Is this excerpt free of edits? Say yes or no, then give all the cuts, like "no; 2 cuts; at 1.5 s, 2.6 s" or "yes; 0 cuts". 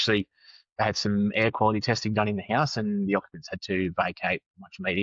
yes; 0 cuts